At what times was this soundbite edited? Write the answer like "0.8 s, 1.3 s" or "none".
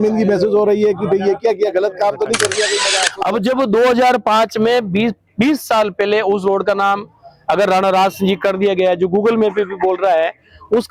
3.0 s